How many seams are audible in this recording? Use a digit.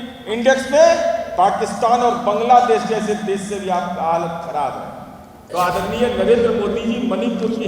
1